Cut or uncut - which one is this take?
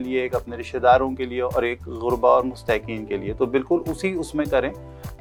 uncut